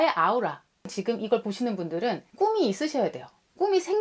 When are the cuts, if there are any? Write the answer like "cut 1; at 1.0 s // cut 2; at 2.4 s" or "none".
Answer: cut 1; at 0.9 s // cut 2; at 2.3 s